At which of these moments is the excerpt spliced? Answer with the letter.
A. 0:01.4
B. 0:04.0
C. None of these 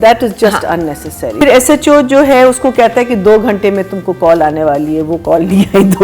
A